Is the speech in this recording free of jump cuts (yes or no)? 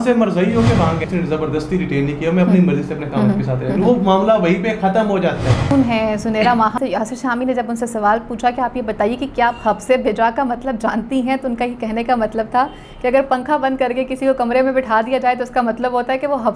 no